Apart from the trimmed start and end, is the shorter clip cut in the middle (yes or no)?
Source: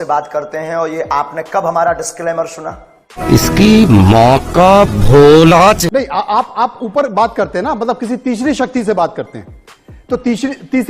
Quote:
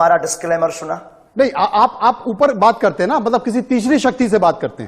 yes